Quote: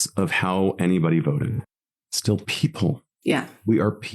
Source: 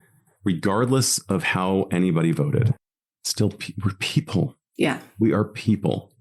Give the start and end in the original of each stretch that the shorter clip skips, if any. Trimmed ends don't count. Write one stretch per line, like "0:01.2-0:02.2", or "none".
0:03.6-0:04.0